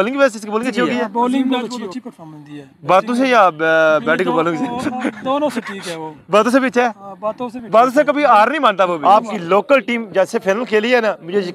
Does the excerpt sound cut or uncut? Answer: cut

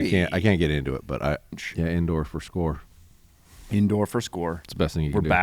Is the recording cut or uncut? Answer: cut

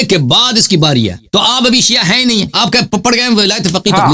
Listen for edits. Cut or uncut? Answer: cut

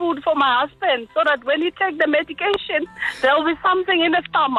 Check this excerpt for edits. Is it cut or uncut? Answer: uncut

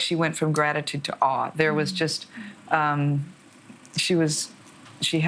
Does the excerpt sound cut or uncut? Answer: uncut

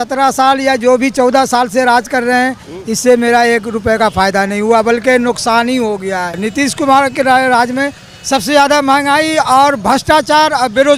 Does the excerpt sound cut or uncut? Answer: cut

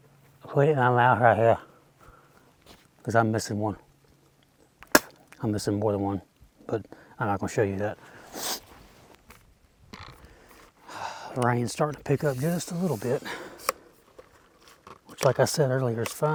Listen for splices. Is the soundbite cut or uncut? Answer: uncut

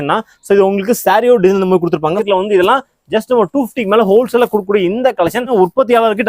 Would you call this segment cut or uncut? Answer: cut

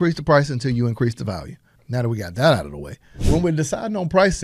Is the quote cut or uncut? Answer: cut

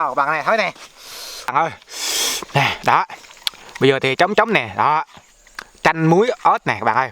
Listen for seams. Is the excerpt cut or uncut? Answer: cut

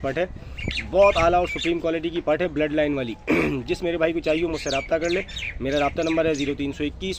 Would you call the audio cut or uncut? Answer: uncut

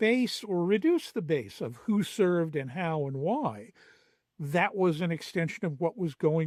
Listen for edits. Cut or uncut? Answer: uncut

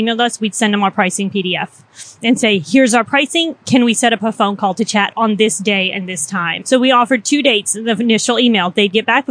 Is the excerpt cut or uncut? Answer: cut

